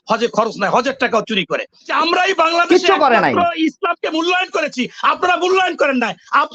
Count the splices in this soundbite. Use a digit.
1